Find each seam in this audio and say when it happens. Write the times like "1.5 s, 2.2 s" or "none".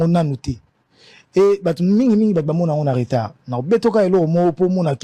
none